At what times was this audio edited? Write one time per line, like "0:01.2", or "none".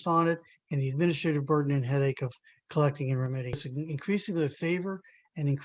0:03.5